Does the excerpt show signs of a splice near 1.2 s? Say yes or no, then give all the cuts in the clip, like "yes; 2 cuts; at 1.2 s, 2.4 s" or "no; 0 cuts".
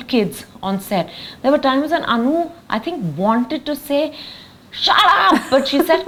no; 0 cuts